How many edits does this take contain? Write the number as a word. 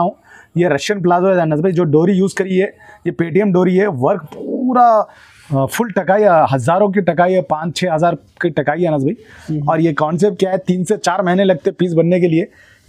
zero